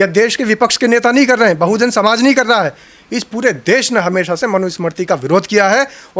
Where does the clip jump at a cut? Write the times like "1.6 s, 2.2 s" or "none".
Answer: none